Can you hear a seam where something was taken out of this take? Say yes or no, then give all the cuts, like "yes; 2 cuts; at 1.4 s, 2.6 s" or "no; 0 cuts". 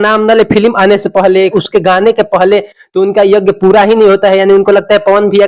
yes; 1 cut; at 1.6 s